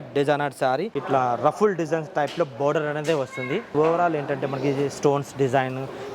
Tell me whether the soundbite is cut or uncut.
cut